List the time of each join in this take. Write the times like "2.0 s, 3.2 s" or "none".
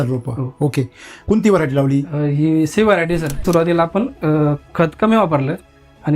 1.1 s, 3.4 s